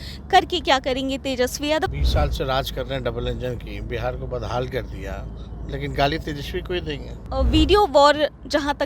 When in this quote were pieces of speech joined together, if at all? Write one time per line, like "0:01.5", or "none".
0:01.9
0:07.3